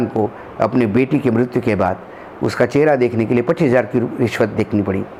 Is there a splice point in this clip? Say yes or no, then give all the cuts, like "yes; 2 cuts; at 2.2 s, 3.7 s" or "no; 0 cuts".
no; 0 cuts